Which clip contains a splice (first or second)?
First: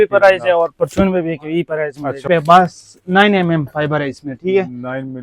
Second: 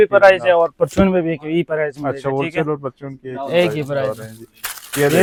first